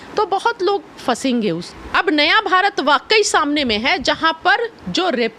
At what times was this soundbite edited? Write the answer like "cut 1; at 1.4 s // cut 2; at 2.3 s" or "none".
cut 1; at 1.7 s